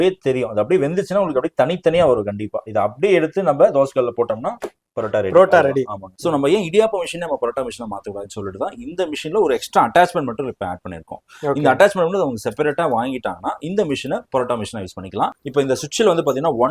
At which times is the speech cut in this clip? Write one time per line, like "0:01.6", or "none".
0:06.0
0:15.4